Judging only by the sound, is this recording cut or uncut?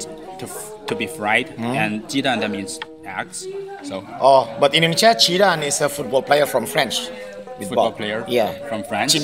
uncut